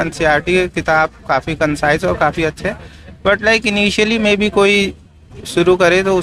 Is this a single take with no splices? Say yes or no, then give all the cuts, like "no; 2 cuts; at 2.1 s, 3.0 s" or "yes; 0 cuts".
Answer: yes; 0 cuts